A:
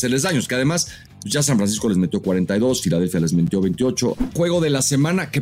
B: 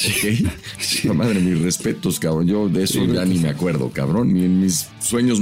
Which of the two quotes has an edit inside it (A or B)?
A